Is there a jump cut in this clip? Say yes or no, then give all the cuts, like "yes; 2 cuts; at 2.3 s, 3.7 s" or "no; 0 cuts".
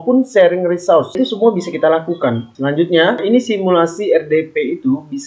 no; 0 cuts